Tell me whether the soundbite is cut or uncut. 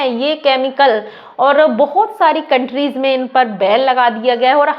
uncut